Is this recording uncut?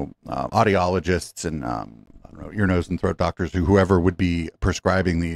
yes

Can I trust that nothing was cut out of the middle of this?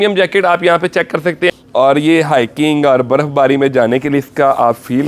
no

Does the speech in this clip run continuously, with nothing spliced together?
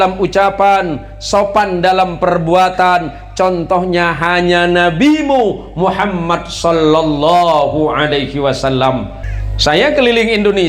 no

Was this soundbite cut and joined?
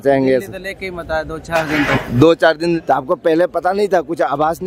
yes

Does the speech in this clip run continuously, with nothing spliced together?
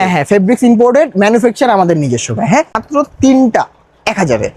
no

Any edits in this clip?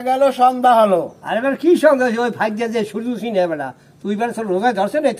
no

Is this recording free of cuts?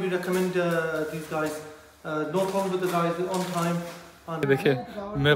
no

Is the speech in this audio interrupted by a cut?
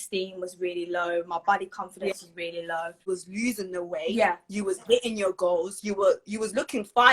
yes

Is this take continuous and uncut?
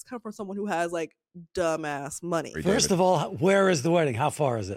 no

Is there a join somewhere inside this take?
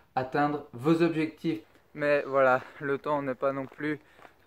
yes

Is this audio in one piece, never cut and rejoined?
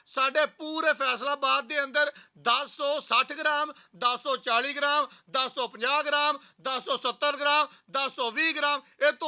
yes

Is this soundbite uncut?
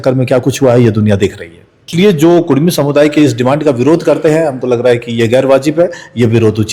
no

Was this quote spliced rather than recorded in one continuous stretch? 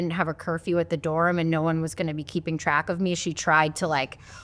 no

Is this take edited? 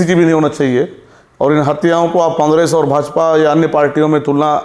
no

